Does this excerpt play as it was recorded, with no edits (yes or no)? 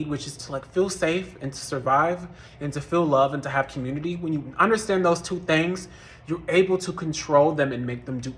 yes